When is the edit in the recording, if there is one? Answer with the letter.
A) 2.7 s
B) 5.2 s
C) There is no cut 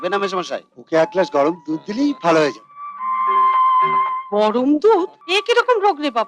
B